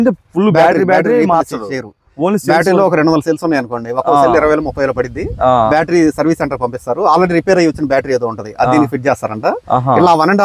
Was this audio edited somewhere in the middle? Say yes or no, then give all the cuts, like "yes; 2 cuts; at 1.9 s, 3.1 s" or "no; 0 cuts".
no; 0 cuts